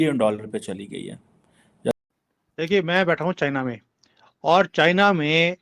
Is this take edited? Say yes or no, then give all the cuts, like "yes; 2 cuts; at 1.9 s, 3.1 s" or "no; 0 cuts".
yes; 1 cut; at 1.9 s